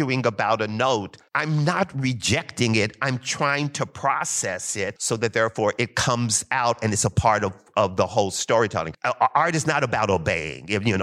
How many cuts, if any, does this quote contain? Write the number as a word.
three